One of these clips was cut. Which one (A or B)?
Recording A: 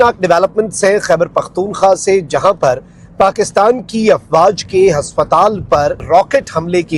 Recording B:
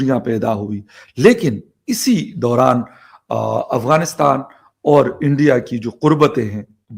A